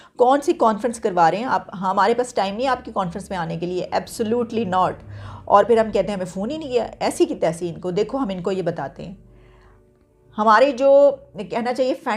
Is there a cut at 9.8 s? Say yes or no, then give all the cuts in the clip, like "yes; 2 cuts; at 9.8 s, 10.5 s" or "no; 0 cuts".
no; 0 cuts